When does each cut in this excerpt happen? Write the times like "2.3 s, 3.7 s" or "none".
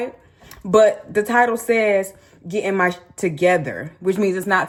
none